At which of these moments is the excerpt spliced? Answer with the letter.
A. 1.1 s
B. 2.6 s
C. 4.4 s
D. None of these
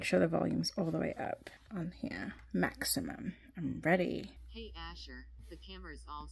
C